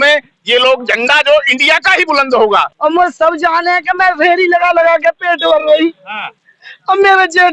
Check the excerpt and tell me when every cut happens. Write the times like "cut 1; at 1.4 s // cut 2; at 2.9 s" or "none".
cut 1; at 2.7 s

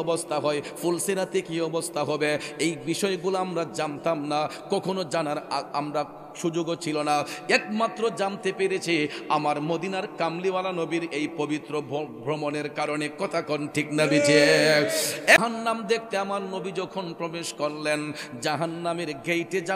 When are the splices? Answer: cut 1; at 15.4 s

